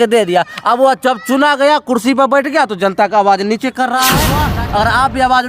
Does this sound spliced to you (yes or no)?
yes